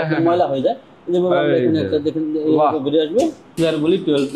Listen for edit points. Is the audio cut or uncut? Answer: cut